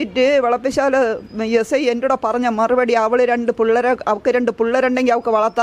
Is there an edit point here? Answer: no; 0 cuts

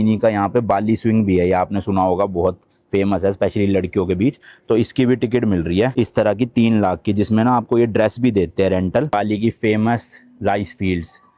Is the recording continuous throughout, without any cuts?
no; 1 cut; at 9.1 s

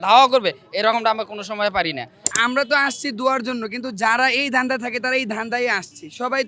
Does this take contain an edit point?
yes; 1 cut; at 2.3 s

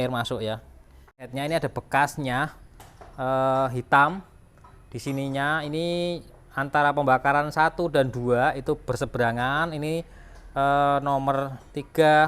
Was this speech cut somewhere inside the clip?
yes; 1 cut; at 1.2 s

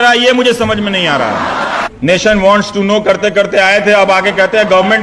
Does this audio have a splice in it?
yes; 1 cut; at 1.8 s

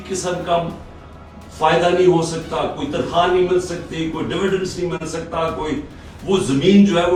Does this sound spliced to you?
no; 0 cuts

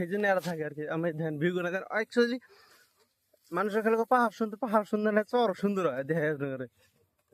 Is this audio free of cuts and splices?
yes; 0 cuts

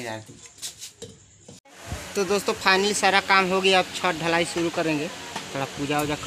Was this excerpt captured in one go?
no; 1 cut; at 1.6 s

